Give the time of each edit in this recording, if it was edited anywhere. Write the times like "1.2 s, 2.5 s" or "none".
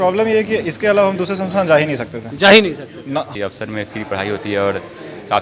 3.3 s